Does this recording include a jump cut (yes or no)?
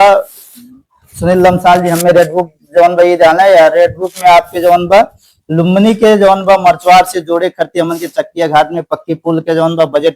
no